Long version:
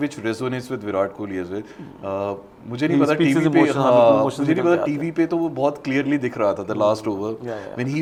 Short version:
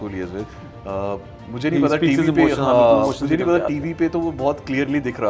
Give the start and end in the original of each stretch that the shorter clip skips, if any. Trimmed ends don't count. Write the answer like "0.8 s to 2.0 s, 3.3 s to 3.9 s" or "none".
none